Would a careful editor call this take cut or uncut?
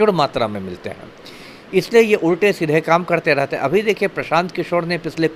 uncut